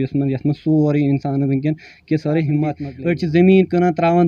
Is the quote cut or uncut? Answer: cut